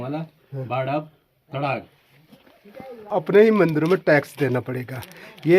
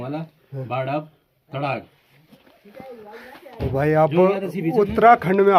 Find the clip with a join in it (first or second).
first